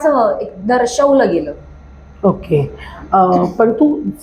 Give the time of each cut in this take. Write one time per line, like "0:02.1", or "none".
none